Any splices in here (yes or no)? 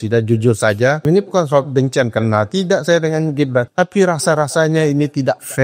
yes